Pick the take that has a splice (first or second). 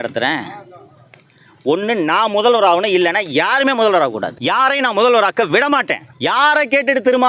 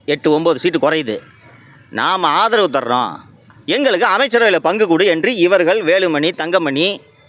first